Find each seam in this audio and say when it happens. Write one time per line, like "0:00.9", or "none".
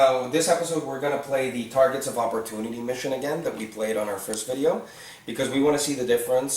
0:05.2